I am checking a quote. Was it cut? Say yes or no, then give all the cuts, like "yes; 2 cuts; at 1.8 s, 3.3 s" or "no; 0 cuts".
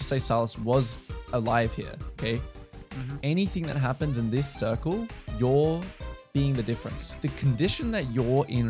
yes; 1 cut; at 7.1 s